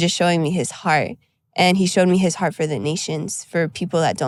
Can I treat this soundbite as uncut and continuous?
yes; 0 cuts

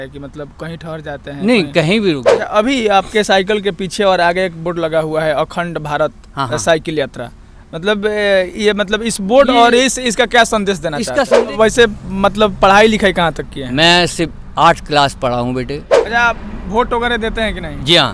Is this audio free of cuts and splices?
no; 3 cuts; at 2.3 s, 11.3 s, 16.0 s

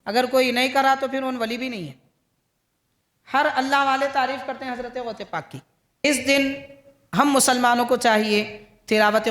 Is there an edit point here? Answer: yes; 1 cut; at 6.0 s

